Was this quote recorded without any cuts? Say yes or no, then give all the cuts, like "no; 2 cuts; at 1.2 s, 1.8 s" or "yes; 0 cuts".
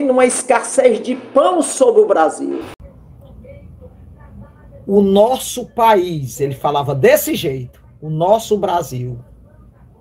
no; 1 cut; at 2.7 s